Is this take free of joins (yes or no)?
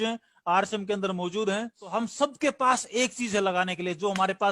no